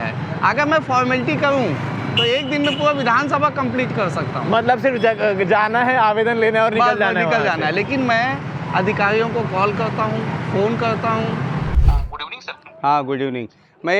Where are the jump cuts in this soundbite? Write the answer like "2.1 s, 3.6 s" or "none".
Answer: 11.7 s